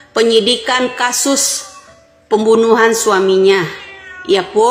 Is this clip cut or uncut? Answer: uncut